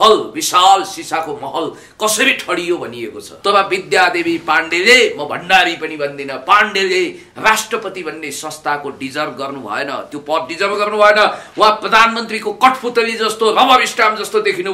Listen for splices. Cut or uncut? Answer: cut